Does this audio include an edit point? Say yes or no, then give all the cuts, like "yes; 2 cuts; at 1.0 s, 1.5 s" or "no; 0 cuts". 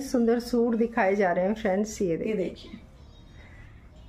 no; 0 cuts